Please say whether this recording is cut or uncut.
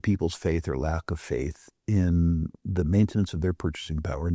uncut